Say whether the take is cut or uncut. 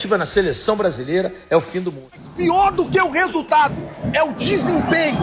cut